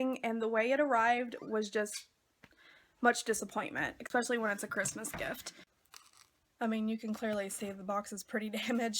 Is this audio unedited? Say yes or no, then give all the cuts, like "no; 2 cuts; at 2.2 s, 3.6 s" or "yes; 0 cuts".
no; 1 cut; at 5.6 s